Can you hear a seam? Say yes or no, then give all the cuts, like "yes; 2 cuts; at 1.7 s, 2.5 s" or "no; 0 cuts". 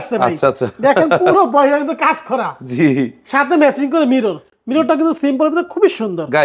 no; 0 cuts